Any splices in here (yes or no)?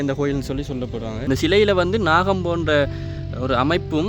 yes